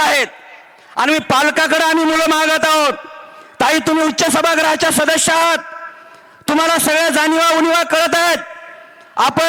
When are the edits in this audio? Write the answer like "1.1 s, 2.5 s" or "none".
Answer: none